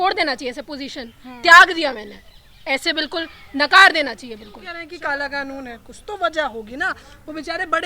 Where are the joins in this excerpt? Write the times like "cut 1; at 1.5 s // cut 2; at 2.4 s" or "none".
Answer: cut 1; at 4.8 s